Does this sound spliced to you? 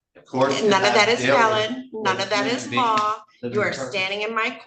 no; 0 cuts

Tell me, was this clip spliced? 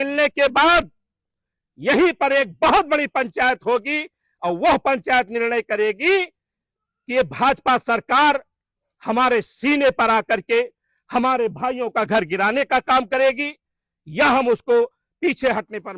no; 0 cuts

